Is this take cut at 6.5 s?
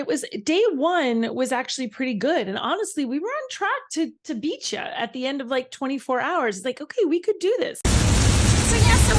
no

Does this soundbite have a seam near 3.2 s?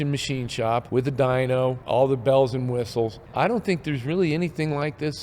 yes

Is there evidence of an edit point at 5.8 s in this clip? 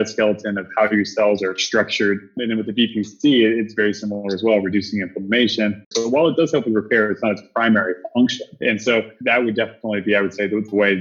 yes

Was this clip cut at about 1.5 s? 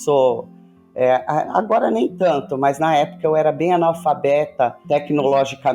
no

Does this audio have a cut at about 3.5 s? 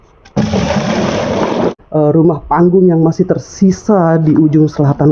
no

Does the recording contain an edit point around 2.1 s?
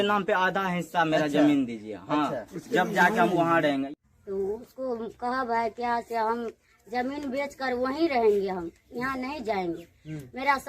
no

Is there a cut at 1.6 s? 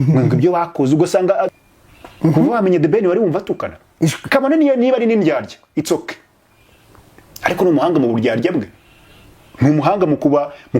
yes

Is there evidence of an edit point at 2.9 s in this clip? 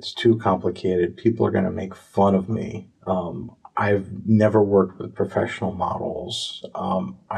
yes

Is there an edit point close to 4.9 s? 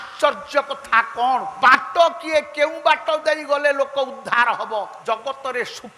yes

